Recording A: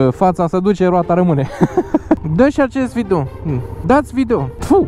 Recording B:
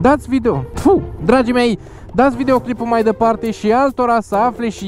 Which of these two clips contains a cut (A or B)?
A